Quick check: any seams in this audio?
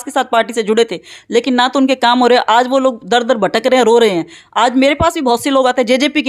no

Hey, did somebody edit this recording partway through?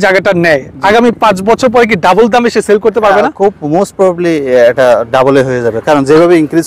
no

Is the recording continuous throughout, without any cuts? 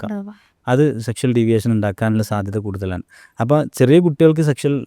yes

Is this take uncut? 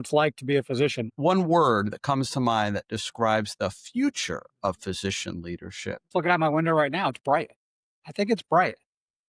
no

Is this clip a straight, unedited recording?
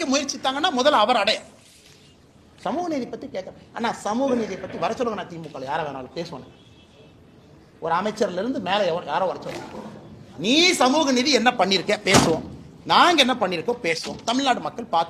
yes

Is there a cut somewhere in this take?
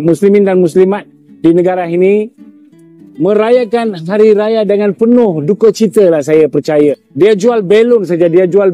yes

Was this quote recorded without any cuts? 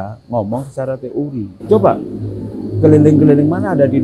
no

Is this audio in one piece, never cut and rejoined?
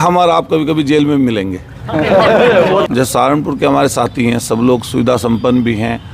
no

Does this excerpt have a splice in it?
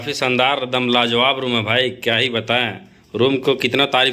no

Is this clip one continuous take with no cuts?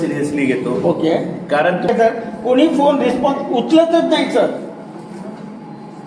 no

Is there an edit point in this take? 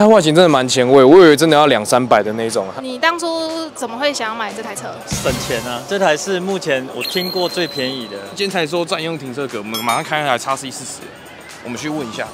yes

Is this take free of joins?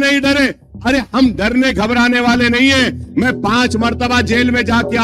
yes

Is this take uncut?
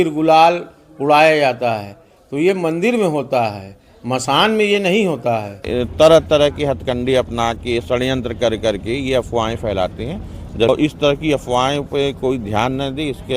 no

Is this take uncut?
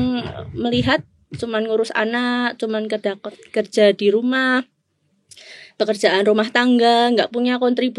yes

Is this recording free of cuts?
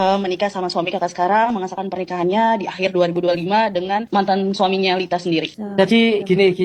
no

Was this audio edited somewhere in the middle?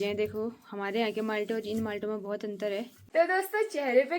yes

